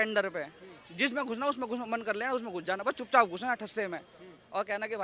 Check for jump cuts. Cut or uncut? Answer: uncut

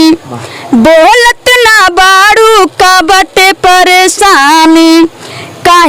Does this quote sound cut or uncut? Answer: uncut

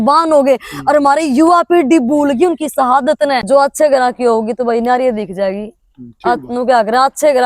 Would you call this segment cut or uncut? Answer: cut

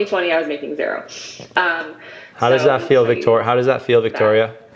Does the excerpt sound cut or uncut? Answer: uncut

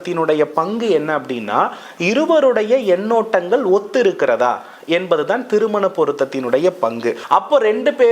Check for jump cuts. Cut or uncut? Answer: cut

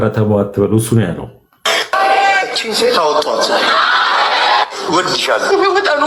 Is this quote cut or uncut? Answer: uncut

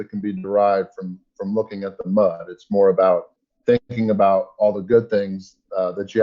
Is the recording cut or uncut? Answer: uncut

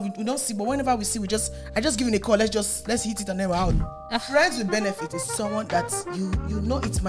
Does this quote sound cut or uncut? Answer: cut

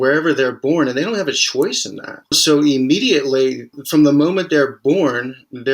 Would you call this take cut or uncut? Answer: cut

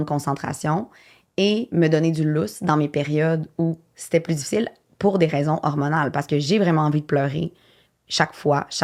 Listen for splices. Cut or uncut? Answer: uncut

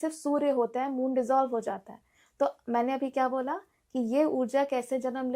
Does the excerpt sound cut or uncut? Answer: uncut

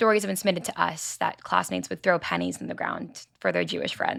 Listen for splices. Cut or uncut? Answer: uncut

